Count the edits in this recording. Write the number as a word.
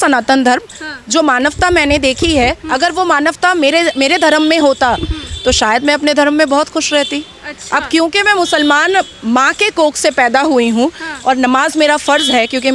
zero